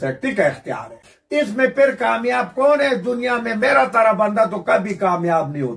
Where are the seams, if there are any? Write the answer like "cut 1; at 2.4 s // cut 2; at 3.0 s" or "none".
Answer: cut 1; at 1.1 s